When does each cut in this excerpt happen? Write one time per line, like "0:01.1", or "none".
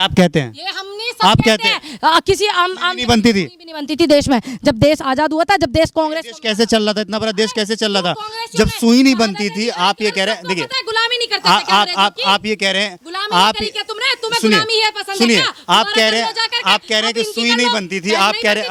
none